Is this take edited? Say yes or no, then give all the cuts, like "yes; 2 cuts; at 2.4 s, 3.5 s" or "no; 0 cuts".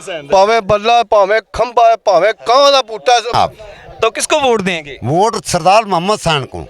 yes; 1 cut; at 3.3 s